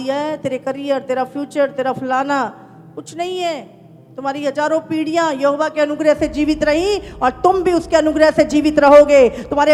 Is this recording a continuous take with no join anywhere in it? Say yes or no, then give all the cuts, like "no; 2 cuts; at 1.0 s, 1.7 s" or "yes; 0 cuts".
yes; 0 cuts